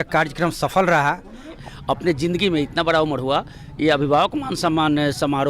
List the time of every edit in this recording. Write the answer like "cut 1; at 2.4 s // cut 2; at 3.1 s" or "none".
cut 1; at 1.6 s